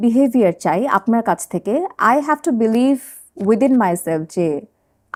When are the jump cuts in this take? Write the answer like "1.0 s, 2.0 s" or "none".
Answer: none